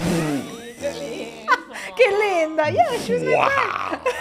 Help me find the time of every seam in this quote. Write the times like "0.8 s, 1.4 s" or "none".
none